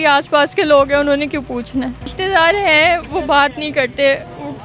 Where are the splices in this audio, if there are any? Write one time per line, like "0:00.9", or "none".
0:02.2

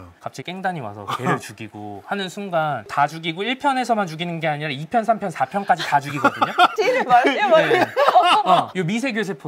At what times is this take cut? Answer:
0:02.8

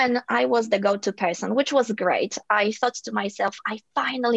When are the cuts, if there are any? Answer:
none

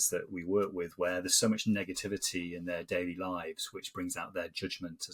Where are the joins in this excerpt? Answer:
none

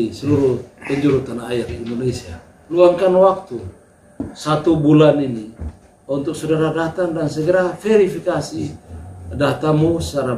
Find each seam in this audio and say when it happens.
0:02.8

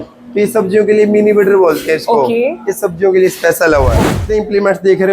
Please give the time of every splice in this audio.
0:04.1

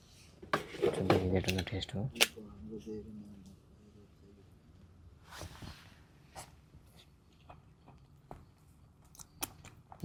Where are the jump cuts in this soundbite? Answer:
none

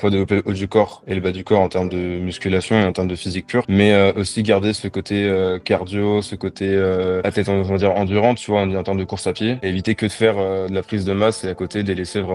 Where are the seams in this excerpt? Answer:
none

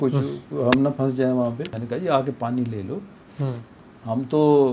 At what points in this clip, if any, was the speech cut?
0:01.8

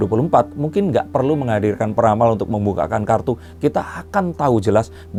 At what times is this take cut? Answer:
none

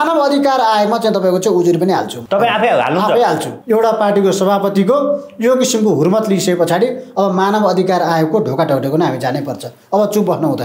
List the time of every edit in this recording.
0:02.1
0:03.5

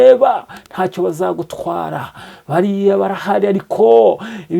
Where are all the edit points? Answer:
none

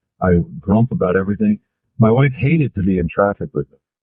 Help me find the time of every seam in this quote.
none

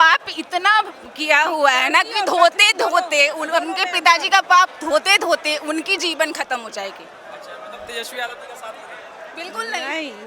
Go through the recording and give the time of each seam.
none

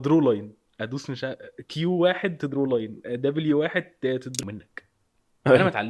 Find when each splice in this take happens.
0:04.4

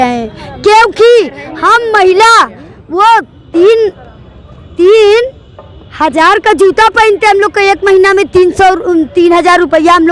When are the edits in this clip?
none

